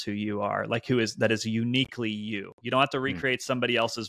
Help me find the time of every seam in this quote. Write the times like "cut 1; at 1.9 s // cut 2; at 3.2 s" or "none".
none